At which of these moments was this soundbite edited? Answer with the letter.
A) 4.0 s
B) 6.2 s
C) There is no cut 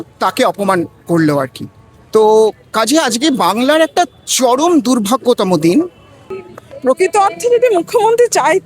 B